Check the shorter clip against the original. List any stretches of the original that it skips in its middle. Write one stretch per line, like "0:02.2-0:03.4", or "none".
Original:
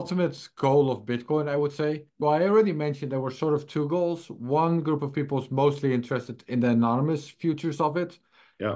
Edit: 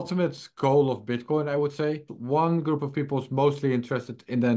0:02.1-0:04.3

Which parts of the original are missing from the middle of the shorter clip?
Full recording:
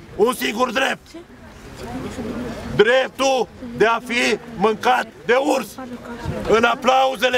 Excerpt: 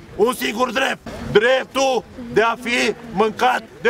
0:01.1-0:02.6

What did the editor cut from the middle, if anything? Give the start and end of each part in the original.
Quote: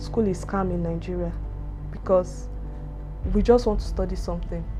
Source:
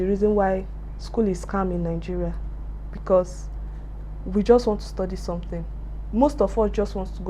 none

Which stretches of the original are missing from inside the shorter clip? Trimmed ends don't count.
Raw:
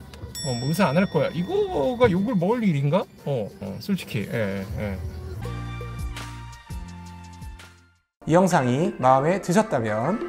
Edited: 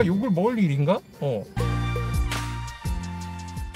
0:03.6-0:05.4

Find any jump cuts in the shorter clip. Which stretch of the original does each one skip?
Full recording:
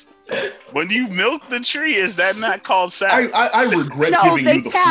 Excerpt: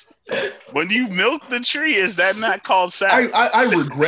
none

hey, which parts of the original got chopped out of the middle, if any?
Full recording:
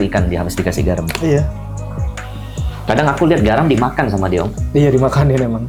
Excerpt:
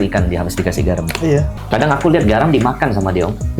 0:01.6-0:02.7

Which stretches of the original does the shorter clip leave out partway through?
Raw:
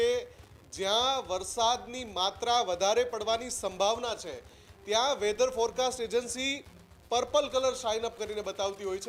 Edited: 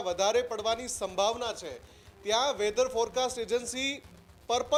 none

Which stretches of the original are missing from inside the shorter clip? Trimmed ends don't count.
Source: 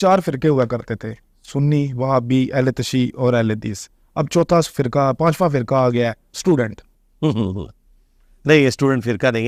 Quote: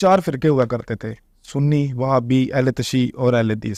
none

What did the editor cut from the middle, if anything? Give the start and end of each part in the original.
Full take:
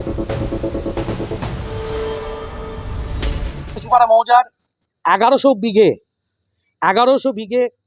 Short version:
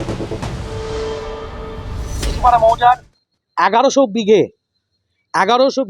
0:03.3-0:03.8

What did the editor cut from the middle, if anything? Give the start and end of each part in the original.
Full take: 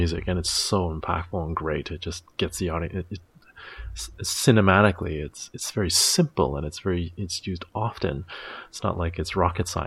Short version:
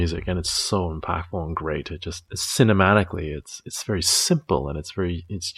0:02.2-0:04.1

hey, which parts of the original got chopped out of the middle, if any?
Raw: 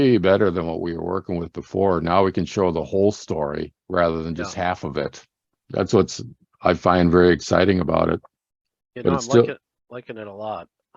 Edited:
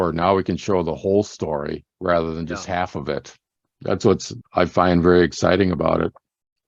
0:06.2-0:06.4

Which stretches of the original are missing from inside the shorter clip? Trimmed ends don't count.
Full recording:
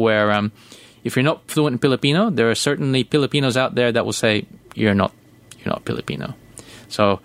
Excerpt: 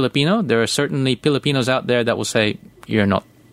none

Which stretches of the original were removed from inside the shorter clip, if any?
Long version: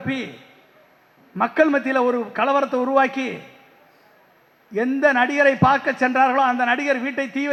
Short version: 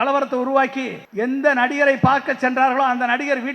0:03.4-0:04.6

